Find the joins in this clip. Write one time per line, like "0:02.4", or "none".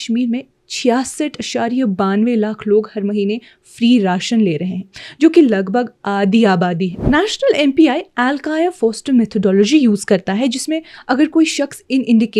0:06.9